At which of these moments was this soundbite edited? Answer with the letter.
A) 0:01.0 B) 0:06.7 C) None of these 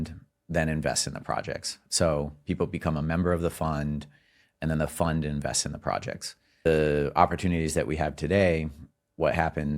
B